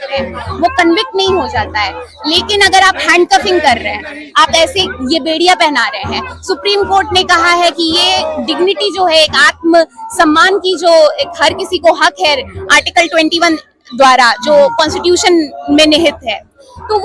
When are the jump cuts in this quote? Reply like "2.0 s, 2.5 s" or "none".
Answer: none